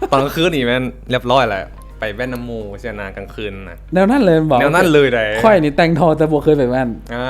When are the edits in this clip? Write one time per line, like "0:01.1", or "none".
none